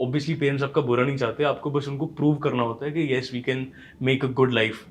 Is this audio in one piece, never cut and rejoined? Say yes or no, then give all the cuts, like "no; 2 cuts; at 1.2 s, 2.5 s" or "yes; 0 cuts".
yes; 0 cuts